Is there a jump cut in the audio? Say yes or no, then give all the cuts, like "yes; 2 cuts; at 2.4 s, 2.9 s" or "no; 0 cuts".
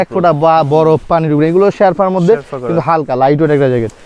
no; 0 cuts